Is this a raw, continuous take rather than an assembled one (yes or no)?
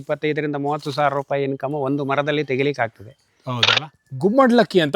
no